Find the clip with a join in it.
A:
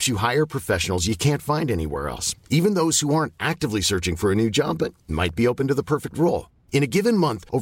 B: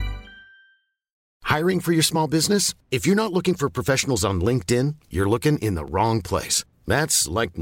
B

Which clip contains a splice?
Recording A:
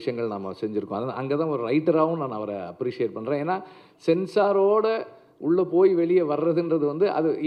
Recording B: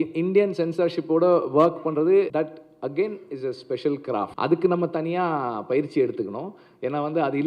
B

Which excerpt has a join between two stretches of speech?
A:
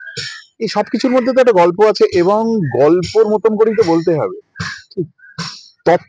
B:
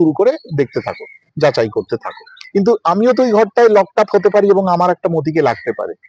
B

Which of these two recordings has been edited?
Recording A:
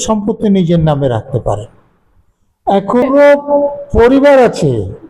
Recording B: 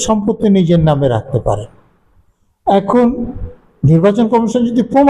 A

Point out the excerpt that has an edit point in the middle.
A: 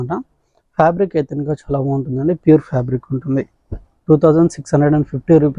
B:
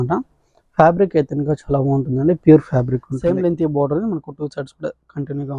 B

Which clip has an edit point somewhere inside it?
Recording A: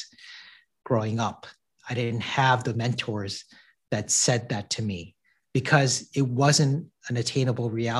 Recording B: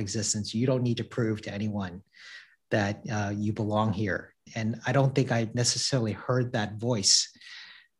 B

